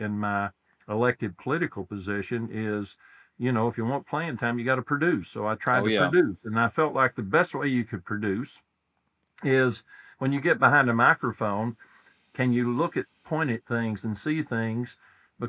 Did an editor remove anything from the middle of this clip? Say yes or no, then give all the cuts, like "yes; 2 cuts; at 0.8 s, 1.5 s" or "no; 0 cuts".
no; 0 cuts